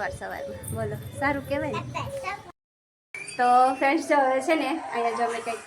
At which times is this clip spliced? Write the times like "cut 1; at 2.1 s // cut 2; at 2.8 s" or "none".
cut 1; at 2.9 s